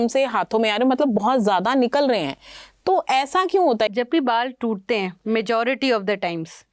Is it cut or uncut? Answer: cut